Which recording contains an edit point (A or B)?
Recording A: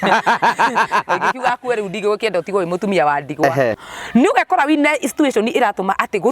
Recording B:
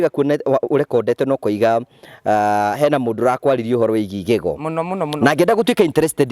A